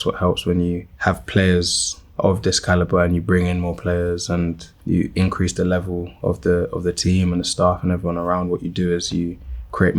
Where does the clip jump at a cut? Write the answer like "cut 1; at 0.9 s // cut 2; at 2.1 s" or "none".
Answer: cut 1; at 0.9 s // cut 2; at 4.7 s